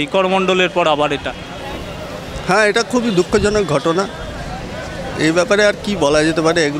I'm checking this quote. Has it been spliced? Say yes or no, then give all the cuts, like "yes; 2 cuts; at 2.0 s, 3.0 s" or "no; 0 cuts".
no; 0 cuts